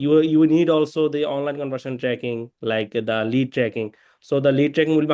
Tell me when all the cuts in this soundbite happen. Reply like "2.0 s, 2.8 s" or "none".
none